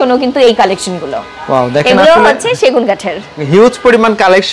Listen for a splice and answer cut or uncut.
uncut